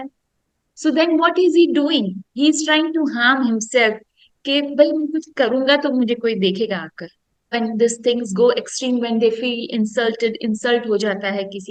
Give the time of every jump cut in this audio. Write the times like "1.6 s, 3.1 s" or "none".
none